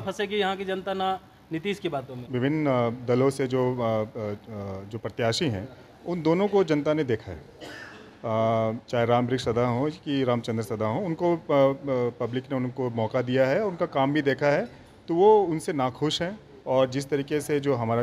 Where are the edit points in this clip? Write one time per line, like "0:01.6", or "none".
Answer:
0:02.2
0:16.5